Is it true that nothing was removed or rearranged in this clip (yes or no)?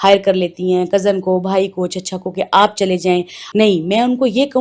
no